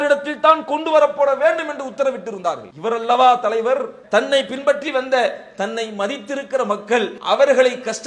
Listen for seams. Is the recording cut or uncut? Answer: cut